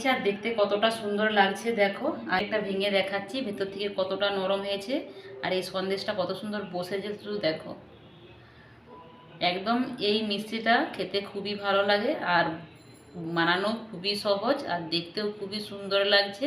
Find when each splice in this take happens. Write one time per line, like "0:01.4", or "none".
0:02.4